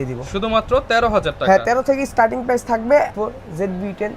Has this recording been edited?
yes; 1 cut; at 3.1 s

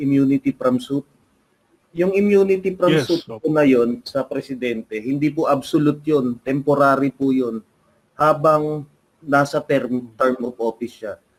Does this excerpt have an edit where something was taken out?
no; 0 cuts

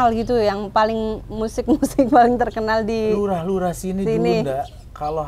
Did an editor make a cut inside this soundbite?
no; 0 cuts

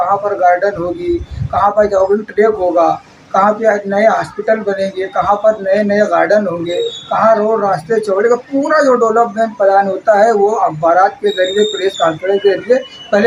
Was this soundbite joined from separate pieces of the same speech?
no; 0 cuts

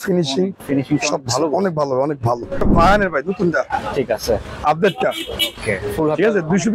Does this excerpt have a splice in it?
yes; 1 cut; at 2.6 s

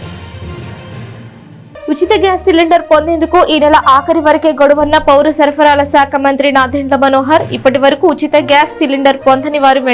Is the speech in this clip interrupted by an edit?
no; 0 cuts

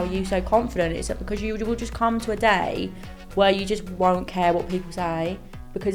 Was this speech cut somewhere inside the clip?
no; 0 cuts

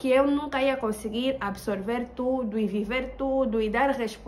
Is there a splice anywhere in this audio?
no; 0 cuts

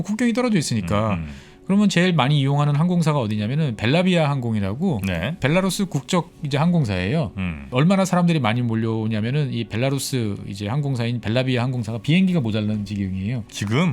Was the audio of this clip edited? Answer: yes; 2 cuts; at 6.4 s, 7.7 s

